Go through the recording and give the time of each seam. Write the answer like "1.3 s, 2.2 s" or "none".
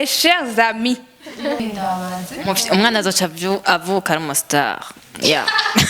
1.6 s